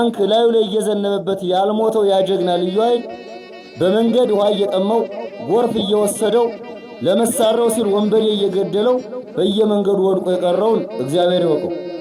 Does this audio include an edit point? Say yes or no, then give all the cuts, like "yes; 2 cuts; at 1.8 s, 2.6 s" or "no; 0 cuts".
no; 0 cuts